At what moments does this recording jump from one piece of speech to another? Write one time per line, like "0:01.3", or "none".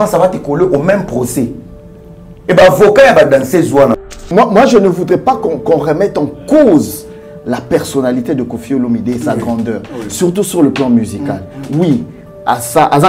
0:04.0